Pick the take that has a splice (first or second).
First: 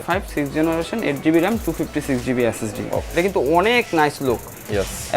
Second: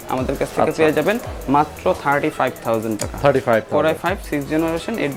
first